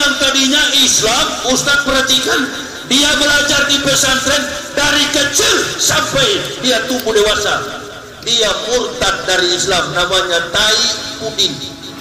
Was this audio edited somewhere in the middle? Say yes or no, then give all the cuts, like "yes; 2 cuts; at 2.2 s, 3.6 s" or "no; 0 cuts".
no; 0 cuts